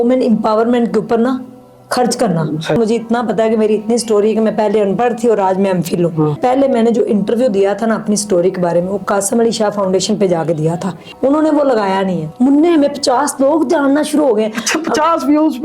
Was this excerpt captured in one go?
no; 4 cuts; at 2.8 s, 6.4 s, 11.0 s, 12.2 s

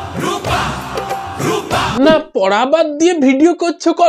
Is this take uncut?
no; 1 cut; at 1.9 s

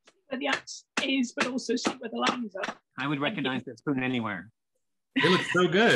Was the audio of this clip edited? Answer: yes; 1 cut; at 2.8 s

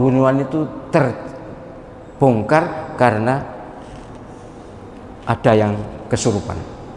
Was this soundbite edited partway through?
no; 0 cuts

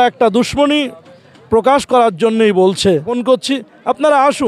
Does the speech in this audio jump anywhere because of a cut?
yes; 1 cut; at 3.1 s

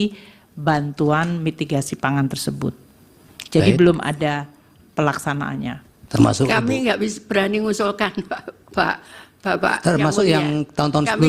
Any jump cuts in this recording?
yes; 1 cut; at 6.0 s

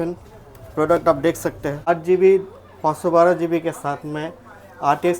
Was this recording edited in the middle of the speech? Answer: yes; 1 cut; at 1.9 s

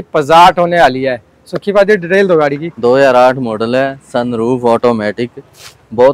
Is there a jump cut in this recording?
no; 0 cuts

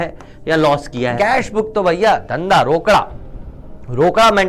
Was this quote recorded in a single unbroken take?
no; 1 cut; at 1.1 s

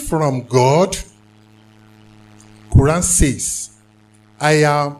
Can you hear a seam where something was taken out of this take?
yes; 1 cut; at 1.1 s

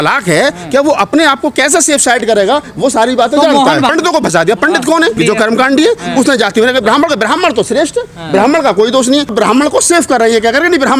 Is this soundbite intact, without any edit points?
no; 3 cuts; at 3.9 s, 5.2 s, 9.3 s

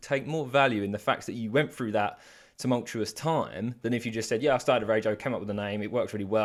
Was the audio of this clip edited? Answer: no; 0 cuts

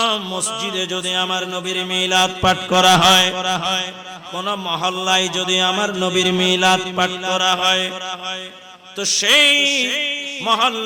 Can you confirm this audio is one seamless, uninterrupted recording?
yes; 0 cuts

